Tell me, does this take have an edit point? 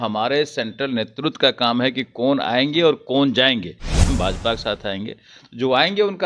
yes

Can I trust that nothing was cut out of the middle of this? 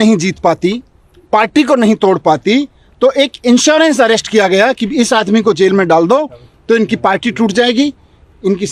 yes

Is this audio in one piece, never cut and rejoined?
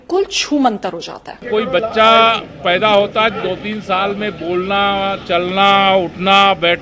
no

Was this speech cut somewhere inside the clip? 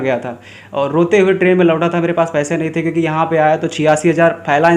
no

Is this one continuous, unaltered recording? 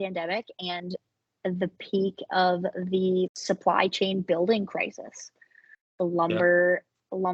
yes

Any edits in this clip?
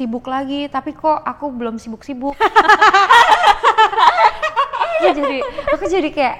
no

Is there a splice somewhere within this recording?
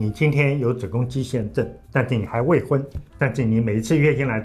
yes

